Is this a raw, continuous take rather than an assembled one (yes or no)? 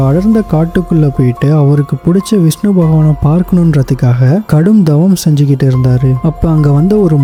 yes